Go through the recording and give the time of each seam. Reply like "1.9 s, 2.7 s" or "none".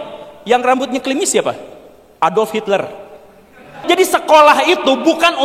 3.8 s